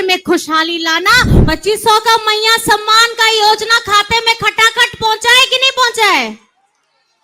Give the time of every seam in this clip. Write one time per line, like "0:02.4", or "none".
0:01.3